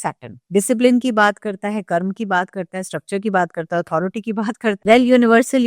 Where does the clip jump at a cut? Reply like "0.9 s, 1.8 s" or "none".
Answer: 4.8 s